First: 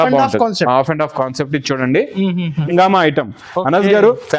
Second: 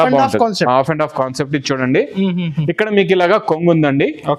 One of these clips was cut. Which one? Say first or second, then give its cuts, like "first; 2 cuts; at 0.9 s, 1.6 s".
first; 1 cut; at 2.7 s